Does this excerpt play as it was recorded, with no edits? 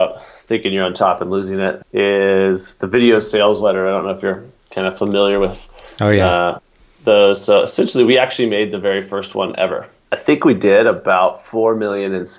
no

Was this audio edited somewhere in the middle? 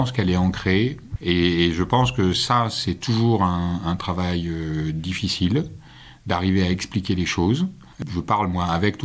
yes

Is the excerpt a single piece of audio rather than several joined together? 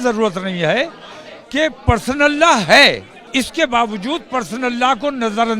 no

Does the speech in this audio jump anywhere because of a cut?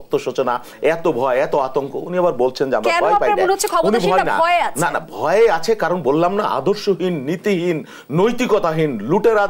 no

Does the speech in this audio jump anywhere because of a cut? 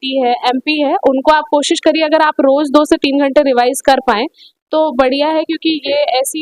no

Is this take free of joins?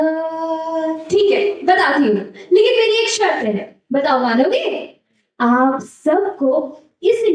no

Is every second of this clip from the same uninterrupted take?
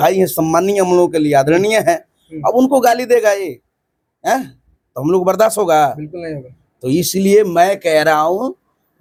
yes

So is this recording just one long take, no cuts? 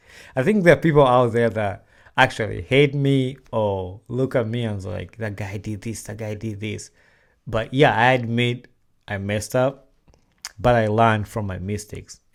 yes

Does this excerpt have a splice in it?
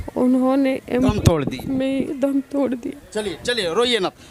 no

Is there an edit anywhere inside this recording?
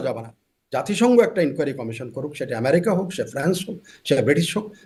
no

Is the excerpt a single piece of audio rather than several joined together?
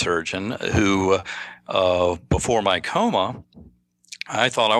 yes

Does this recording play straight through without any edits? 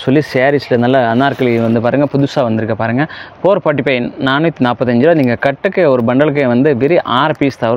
yes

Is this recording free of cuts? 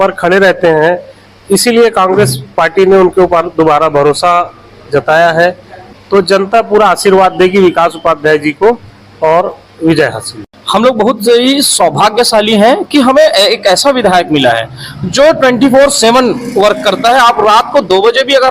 no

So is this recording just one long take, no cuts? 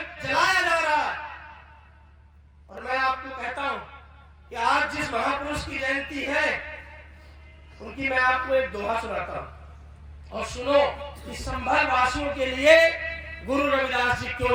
yes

